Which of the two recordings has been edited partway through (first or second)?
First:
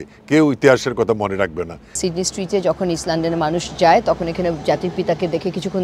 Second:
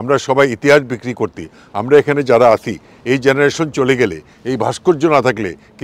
first